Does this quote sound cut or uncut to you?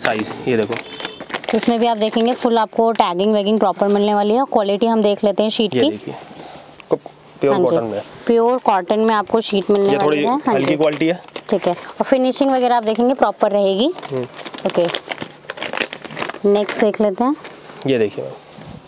uncut